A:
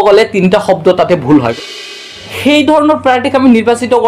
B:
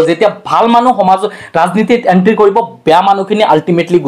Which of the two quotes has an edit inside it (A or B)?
A